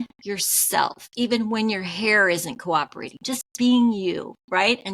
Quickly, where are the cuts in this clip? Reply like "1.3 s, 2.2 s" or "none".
1.0 s